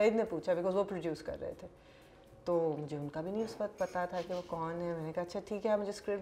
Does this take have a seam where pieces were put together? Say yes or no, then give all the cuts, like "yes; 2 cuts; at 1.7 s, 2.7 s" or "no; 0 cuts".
no; 0 cuts